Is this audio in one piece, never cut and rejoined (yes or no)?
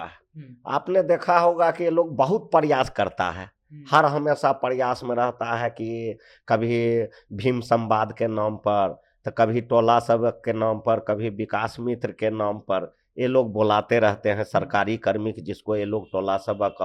yes